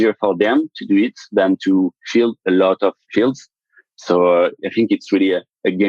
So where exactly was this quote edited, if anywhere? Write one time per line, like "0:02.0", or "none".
0:03.5
0:04.6